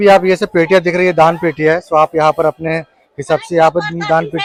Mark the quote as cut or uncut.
uncut